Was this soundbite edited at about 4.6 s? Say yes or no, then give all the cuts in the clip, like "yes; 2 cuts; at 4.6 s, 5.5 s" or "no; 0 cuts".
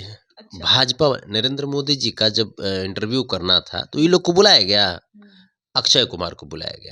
no; 0 cuts